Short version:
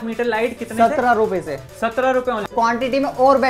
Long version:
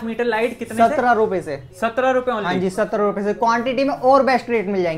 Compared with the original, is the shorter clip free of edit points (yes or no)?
no